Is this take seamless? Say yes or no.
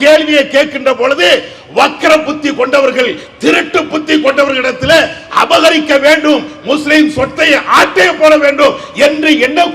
yes